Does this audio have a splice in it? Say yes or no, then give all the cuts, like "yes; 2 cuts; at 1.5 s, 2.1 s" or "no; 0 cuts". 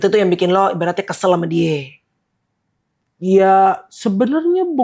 no; 0 cuts